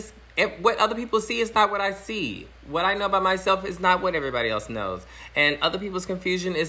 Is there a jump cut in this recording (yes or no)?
no